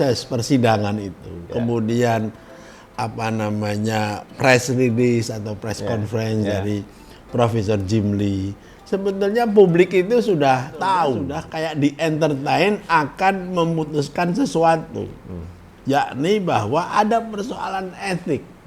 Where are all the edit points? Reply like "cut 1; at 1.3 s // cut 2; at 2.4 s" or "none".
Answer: cut 1; at 11.4 s